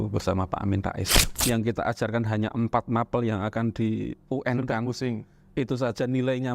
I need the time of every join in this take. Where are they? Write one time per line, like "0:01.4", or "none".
0:01.1